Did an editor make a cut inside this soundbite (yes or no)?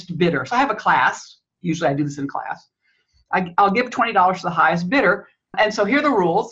yes